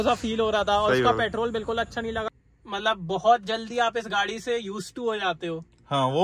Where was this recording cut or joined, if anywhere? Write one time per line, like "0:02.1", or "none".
0:02.3